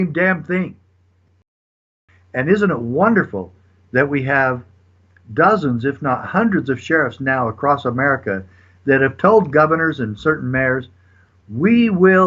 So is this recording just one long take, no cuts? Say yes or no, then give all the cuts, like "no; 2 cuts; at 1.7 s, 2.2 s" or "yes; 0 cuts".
no; 1 cut; at 1.8 s